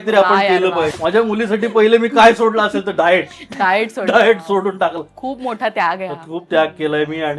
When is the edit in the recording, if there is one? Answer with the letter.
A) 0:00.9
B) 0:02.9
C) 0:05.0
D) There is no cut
A